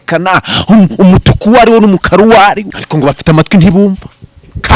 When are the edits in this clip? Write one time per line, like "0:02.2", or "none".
0:02.8